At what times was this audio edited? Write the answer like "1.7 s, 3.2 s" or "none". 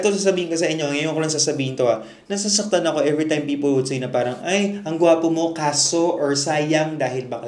none